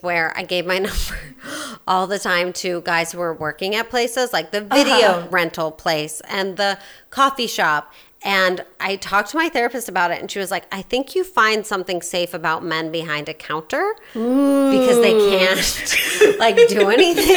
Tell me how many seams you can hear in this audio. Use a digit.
1